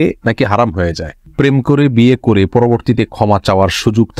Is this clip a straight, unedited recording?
no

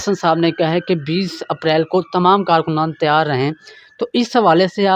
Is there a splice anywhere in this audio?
no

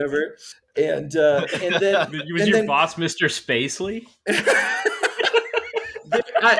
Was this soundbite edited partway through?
no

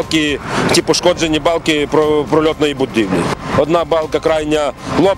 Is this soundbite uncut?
no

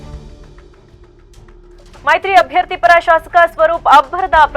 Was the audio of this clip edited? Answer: no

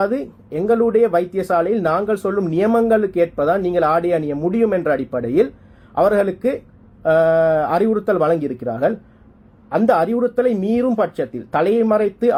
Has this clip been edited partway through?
no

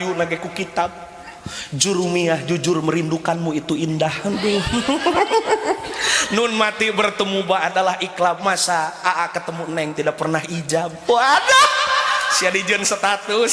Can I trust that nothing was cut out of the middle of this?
yes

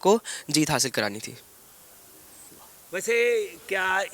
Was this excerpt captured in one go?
yes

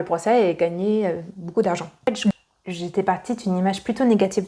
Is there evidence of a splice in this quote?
yes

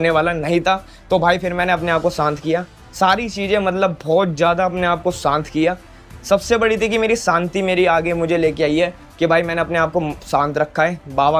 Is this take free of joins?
yes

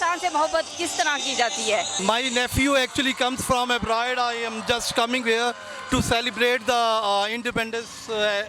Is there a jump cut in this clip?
no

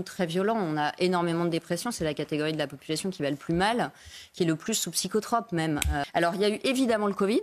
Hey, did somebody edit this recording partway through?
yes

